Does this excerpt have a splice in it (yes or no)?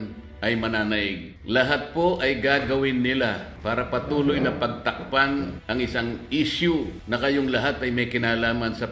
yes